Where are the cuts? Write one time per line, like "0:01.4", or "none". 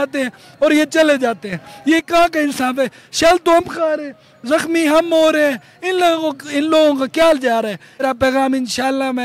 0:08.0